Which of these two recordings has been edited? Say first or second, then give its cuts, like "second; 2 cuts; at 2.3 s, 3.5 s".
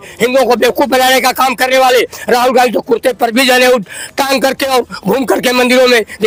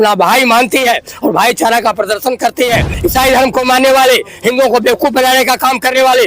second; 1 cut; at 2.9 s